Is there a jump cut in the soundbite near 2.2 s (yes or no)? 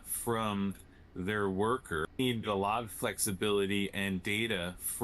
yes